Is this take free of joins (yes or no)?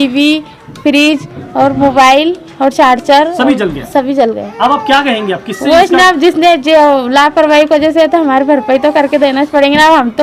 yes